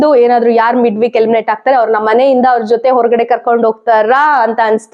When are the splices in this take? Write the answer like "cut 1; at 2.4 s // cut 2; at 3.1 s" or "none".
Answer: none